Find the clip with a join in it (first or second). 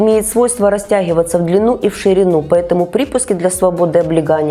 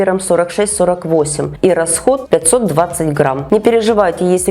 second